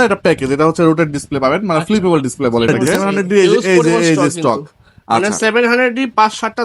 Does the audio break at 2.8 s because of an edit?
yes; 1 cut; at 2.8 s

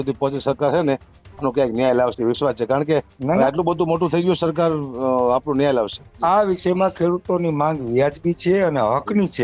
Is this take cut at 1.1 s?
no; 1 cut; at 6.1 s

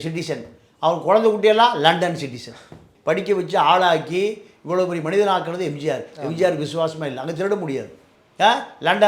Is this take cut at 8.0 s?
yes; 2 cuts; at 2.9 s, 8.0 s

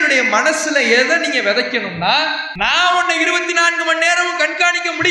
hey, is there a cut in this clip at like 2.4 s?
yes; 1 cut; at 2.4 s

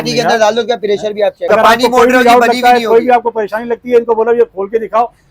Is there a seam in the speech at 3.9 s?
no; 1 cut; at 1.4 s

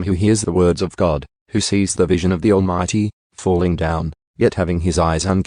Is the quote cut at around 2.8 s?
no; 1 cut; at 1.4 s

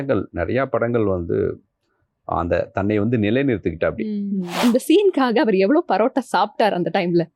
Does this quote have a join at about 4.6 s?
yes; 1 cut; at 4.6 s

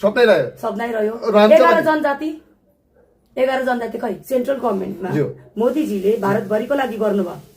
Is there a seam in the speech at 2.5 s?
no; 1 cut; at 4.2 s

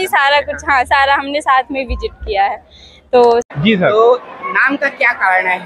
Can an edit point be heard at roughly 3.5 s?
yes; 1 cut; at 3.5 s

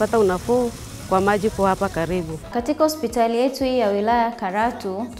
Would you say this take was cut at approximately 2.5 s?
yes; 1 cut; at 2.5 s

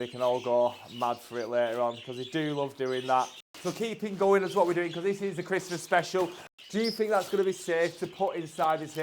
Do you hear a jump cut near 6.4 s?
yes; 2 cuts; at 3.4 s, 6.4 s

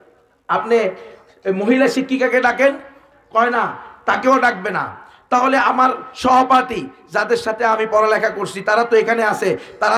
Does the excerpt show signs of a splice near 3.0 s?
yes; 1 cut; at 3.0 s

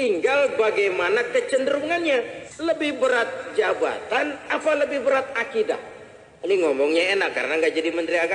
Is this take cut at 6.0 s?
no; 1 cut; at 2.4 s

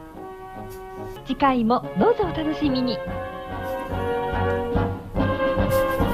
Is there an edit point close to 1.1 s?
yes; 1 cut; at 1.1 s

